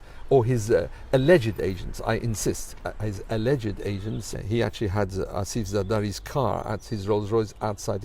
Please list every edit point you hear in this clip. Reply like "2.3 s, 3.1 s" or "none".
4.3 s